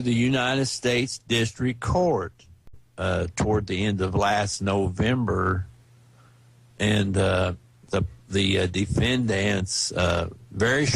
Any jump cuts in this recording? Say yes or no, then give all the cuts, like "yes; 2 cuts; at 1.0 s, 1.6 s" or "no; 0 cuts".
yes; 1 cut; at 2.9 s